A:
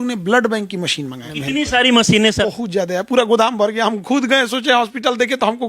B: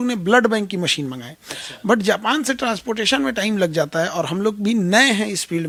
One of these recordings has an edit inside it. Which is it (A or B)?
A